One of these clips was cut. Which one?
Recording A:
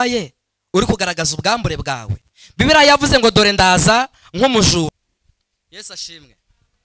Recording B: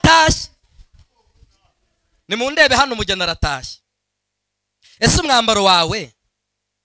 A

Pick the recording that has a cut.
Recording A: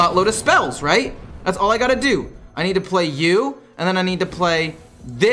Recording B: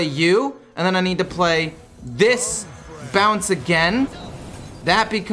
B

